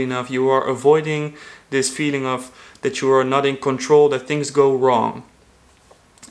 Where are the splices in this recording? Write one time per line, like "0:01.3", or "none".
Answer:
none

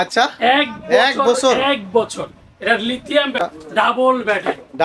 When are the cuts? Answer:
0:03.4

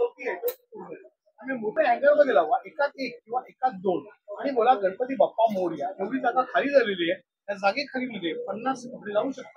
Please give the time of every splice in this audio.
0:01.7

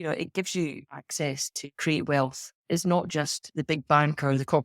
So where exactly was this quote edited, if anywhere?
0:03.4

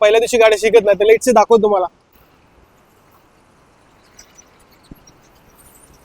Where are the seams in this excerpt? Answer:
0:02.1

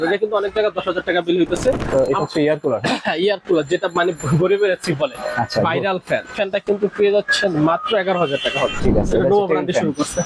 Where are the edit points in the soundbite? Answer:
0:01.8
0:06.3
0:08.8

